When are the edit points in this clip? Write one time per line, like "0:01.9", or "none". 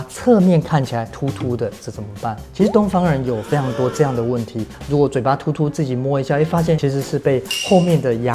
0:01.1
0:04.8
0:06.8